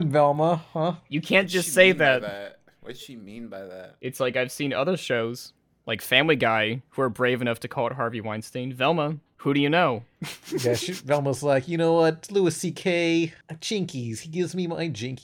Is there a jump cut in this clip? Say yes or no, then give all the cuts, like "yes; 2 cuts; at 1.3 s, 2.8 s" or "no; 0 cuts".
yes; 2 cuts; at 9.3 s, 13.5 s